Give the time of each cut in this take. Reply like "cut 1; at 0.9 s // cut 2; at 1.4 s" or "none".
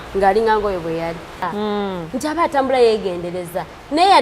cut 1; at 1.5 s

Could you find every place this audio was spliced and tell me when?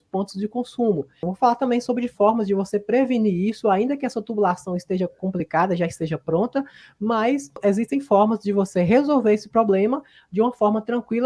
cut 1; at 1.2 s // cut 2; at 7.5 s

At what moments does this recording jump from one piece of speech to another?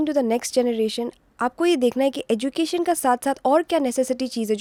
none

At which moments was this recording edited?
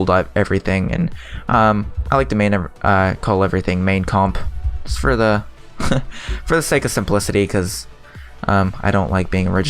cut 1; at 3.4 s

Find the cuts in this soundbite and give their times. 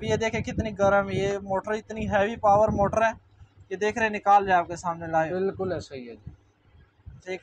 none

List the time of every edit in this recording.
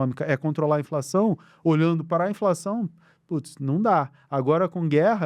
none

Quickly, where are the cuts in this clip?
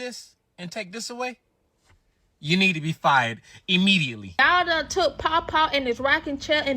cut 1; at 4.4 s

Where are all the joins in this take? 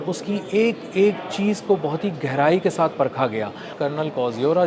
cut 1; at 3.7 s

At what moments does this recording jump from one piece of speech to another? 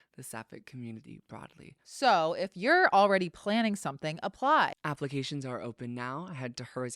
cut 1; at 4.8 s

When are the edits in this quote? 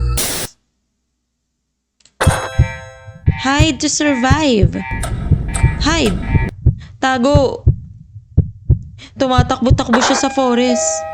none

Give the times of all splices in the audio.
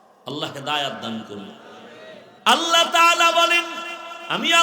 cut 1; at 2.3 s

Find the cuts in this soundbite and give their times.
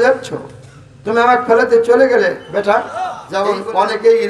cut 1; at 3.2 s

